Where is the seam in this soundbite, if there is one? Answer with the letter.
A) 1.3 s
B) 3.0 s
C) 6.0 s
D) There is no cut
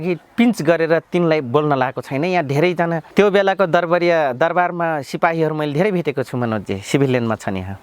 B